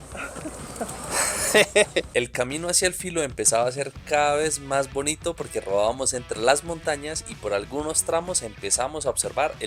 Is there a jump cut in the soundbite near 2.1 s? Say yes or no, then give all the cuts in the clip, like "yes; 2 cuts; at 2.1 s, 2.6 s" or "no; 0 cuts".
yes; 1 cut; at 2.1 s